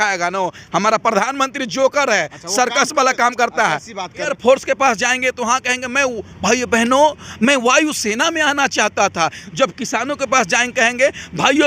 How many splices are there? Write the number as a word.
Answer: one